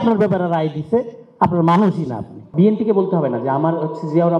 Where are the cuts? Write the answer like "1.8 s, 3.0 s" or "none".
2.4 s